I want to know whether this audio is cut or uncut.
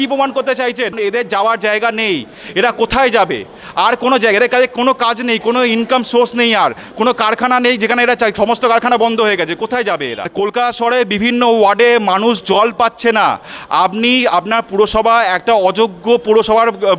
cut